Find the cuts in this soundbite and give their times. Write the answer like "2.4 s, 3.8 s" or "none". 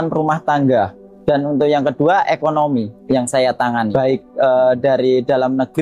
1.1 s, 3.0 s, 3.9 s